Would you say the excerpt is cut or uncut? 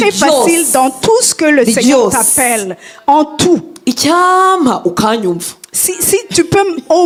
uncut